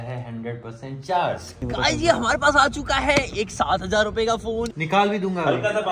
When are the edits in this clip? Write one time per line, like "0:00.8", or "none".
0:01.5
0:04.8